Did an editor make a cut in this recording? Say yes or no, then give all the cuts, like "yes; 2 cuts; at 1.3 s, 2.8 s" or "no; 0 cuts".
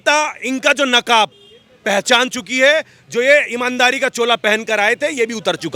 no; 0 cuts